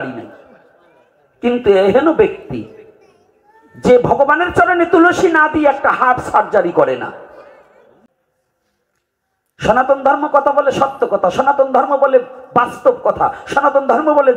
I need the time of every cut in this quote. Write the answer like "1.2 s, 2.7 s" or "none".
8.0 s